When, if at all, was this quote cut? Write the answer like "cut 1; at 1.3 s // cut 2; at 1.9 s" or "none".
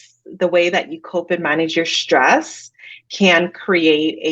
none